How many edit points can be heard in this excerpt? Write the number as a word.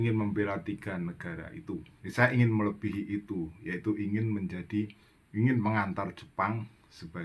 one